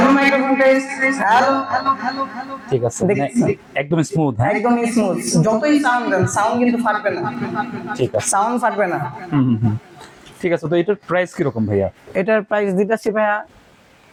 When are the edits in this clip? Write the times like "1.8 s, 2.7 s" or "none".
none